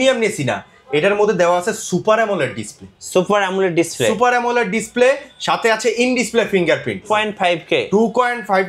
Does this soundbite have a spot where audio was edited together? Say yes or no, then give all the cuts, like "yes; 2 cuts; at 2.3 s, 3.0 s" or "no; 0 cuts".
yes; 1 cut; at 7.1 s